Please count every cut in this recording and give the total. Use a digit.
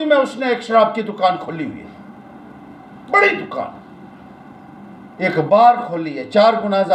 0